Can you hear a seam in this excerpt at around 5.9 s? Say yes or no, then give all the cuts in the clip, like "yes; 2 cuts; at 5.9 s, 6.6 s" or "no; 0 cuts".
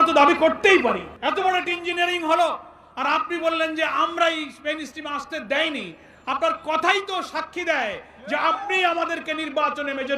no; 1 cut; at 1.1 s